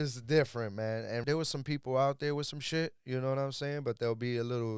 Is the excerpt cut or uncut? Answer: cut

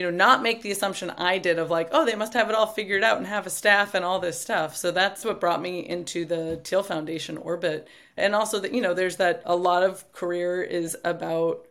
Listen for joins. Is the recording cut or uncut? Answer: uncut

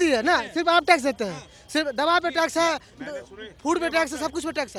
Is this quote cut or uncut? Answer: uncut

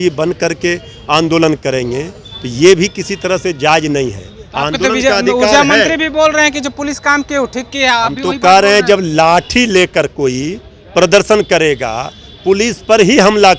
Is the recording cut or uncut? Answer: uncut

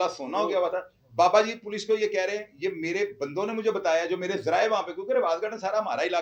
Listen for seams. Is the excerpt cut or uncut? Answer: uncut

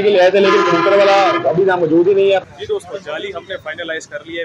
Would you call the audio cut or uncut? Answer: cut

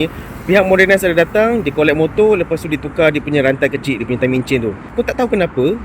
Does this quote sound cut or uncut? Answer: cut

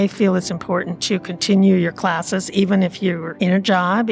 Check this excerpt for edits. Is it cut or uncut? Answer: uncut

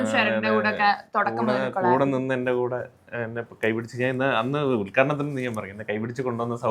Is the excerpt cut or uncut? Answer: uncut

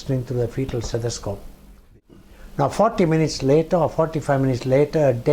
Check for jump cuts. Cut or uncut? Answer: cut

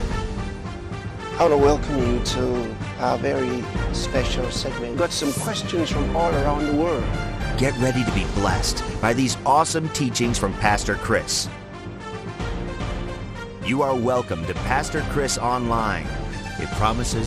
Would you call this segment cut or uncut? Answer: uncut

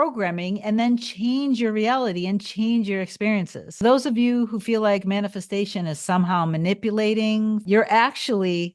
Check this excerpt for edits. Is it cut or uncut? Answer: cut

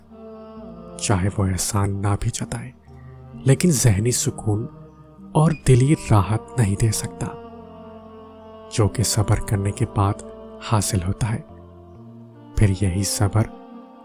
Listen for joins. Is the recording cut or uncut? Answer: uncut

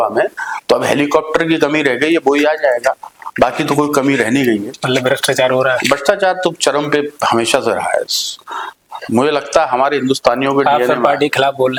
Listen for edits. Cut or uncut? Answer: uncut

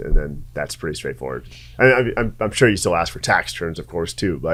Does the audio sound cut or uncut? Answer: uncut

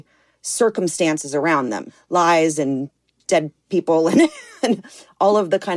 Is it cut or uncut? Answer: cut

